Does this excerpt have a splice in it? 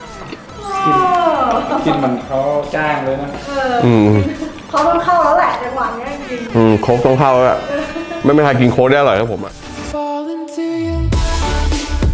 yes; 1 cut; at 9.3 s

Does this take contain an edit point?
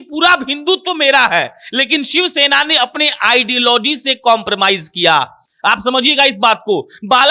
no; 0 cuts

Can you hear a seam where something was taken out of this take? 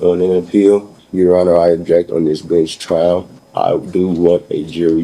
yes; 2 cuts; at 1.0 s, 3.4 s

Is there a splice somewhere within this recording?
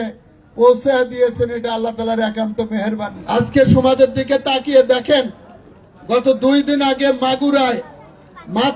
yes; 1 cut; at 3.1 s

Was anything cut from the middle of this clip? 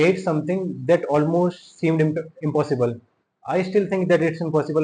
no; 0 cuts

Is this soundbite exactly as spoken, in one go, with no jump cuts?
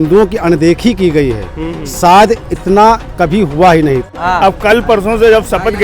no; 1 cut; at 4.2 s

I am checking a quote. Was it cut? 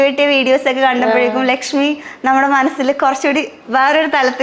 no; 0 cuts

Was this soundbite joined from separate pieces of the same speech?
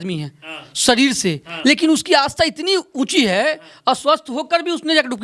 no; 0 cuts

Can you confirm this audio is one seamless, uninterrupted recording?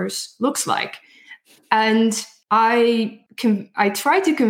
no; 2 cuts; at 2.3 s, 3.2 s

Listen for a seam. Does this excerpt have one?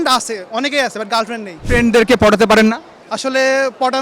yes; 1 cut; at 1.5 s

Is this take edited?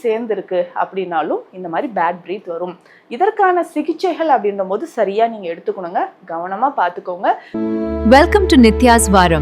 yes; 1 cut; at 7.5 s

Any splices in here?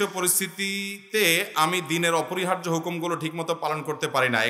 no; 0 cuts

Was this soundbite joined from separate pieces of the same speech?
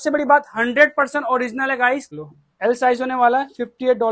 yes; 1 cut; at 2.1 s

